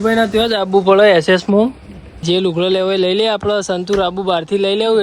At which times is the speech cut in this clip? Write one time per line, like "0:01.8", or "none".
0:02.2